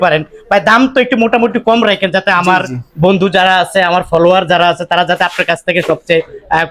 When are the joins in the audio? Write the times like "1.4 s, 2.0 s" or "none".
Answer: none